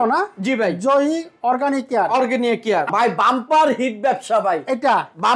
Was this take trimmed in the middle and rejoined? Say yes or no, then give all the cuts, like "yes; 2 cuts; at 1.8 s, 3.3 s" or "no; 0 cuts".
yes; 1 cut; at 2.9 s